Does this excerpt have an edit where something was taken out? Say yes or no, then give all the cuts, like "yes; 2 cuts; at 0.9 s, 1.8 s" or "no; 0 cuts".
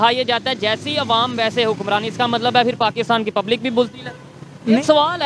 no; 0 cuts